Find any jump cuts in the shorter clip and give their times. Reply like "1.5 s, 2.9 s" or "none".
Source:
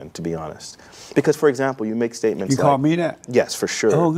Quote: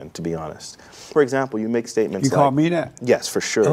1.1 s